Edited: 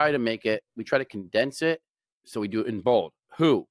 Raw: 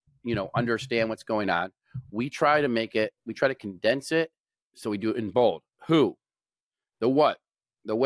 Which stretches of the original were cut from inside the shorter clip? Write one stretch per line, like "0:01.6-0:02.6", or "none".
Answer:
none